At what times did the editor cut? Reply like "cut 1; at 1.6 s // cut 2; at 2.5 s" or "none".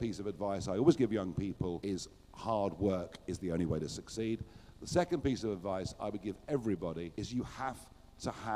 none